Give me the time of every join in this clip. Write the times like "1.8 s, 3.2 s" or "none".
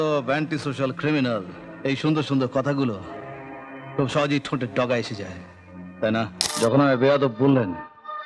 6.4 s